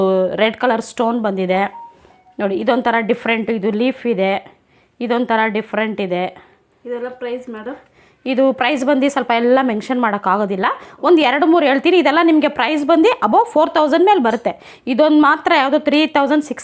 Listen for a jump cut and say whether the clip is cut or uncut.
uncut